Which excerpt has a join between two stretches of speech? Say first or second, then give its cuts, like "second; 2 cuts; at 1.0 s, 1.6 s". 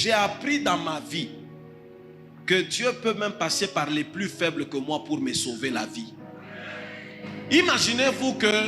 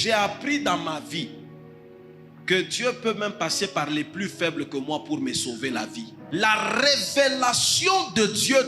second; 1 cut; at 6.1 s